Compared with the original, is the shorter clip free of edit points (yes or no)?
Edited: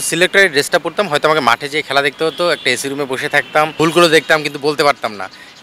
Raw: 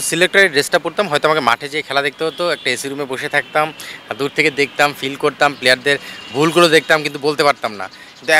no